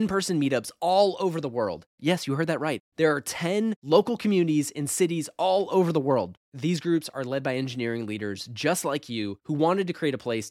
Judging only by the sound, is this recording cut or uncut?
uncut